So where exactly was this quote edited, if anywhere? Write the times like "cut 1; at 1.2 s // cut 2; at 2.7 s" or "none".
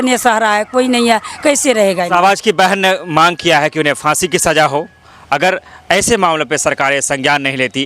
none